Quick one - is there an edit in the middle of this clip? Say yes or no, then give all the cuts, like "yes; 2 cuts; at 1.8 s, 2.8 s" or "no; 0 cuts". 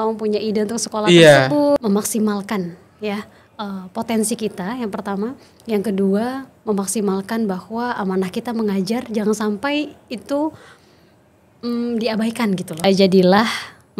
yes; 2 cuts; at 1.8 s, 12.7 s